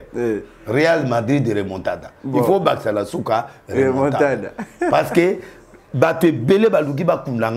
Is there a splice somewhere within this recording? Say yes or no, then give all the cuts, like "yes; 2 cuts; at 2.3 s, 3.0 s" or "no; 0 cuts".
no; 0 cuts